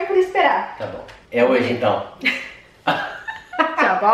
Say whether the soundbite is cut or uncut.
uncut